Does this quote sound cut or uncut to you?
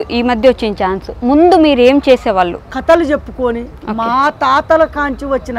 cut